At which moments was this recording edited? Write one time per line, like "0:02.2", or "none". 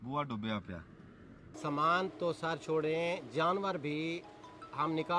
0:01.4